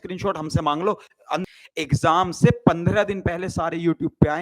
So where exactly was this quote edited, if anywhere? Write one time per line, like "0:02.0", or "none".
0:01.4

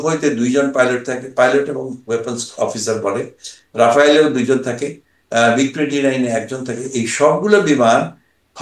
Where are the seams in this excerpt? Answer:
none

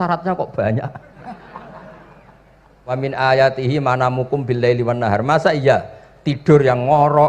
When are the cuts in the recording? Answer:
0:03.0

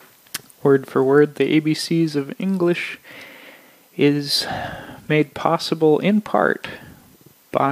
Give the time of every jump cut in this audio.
none

